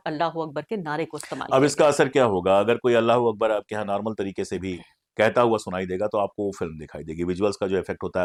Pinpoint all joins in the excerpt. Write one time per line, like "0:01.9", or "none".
none